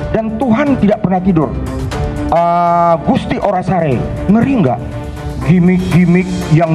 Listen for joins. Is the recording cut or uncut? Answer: uncut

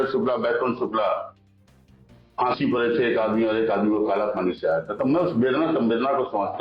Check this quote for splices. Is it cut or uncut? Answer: uncut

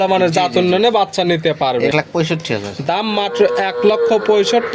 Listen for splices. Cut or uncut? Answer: cut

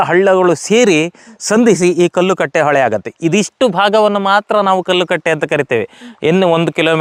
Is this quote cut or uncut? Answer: uncut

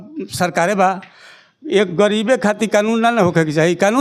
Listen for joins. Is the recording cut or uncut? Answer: uncut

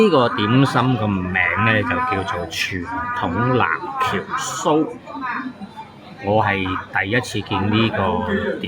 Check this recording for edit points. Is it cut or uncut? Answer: uncut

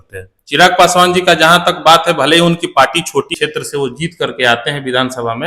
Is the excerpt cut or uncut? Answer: cut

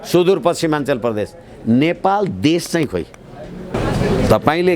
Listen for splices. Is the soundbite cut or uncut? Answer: cut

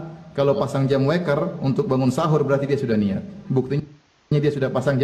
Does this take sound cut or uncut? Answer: uncut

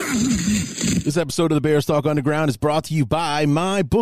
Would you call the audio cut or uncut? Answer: cut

